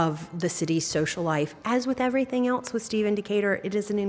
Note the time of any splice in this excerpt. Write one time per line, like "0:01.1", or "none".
0:01.5